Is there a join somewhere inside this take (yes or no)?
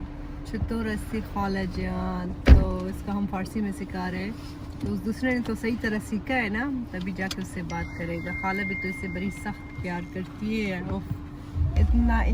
no